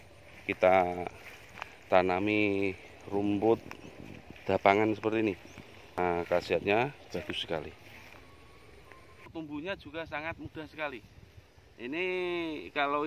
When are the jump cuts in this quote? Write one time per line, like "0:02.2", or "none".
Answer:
0:06.0
0:09.3